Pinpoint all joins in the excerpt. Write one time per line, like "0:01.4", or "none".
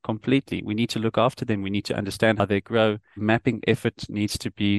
0:03.2